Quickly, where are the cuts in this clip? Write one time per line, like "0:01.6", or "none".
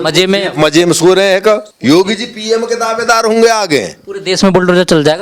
0:01.7